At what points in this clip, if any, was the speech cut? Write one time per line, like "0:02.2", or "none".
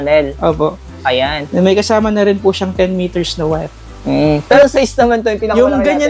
0:04.6

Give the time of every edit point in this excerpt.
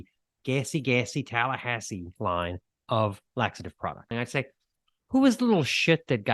0:04.1

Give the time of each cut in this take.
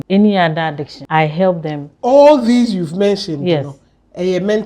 0:00.9

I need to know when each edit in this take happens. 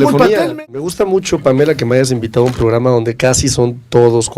0:00.9

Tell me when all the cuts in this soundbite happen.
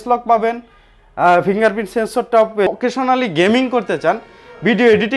0:02.7

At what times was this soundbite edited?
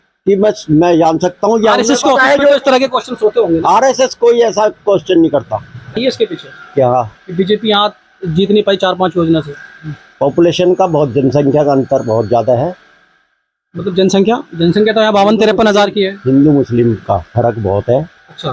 0:06.0

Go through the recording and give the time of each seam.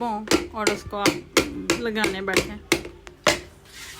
0:03.0

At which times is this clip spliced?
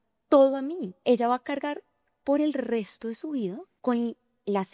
0:00.9
0:03.7

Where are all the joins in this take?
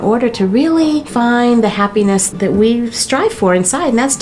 0:01.1
0:02.3

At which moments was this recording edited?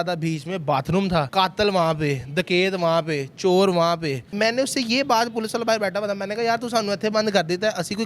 0:01.3
0:04.3

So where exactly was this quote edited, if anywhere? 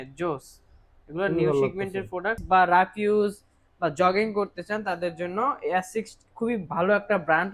0:02.4

